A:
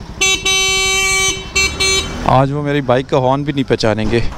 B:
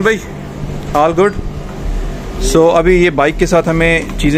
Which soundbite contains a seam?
A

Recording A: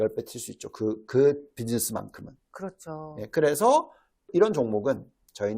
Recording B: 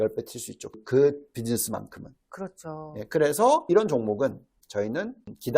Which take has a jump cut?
B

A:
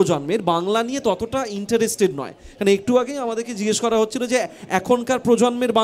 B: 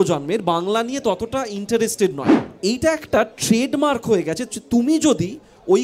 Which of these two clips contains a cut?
B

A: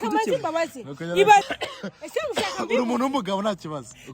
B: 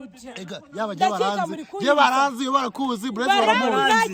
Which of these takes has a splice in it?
A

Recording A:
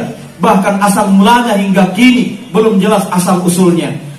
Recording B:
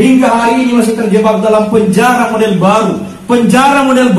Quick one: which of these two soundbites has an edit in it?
A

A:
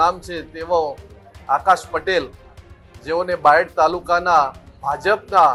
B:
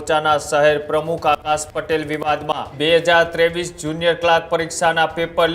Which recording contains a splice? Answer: B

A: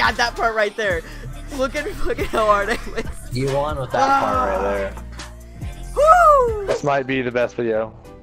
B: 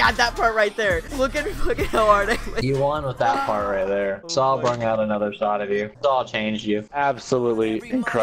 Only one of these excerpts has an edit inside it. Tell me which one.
B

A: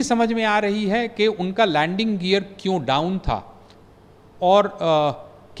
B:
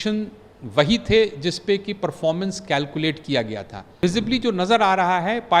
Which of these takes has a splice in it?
B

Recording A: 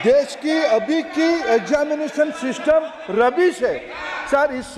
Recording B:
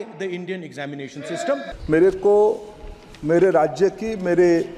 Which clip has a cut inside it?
B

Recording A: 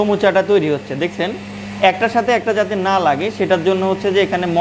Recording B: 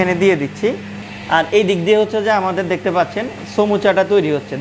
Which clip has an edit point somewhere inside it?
B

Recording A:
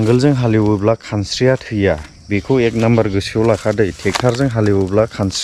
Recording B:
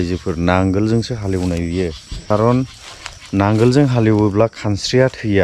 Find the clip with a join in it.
B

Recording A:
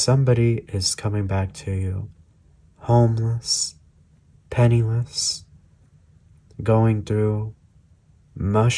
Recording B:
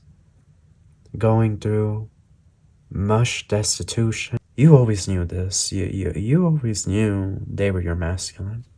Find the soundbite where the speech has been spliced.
B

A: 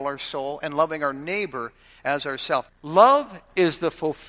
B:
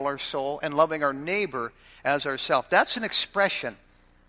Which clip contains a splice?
A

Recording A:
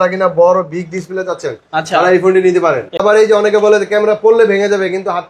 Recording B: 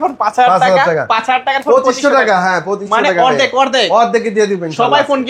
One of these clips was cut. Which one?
A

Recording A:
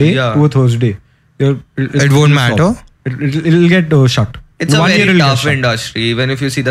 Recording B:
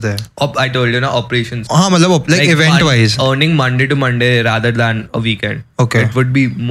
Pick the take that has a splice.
B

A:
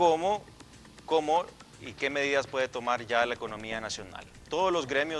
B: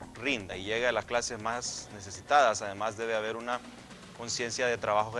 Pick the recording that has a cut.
A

